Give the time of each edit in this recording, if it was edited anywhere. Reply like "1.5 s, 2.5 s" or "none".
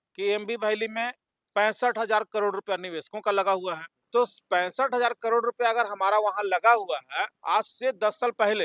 3.9 s